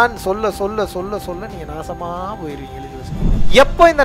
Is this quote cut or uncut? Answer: cut